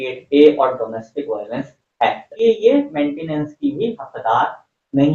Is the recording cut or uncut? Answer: cut